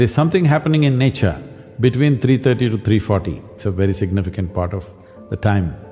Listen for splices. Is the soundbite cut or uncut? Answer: cut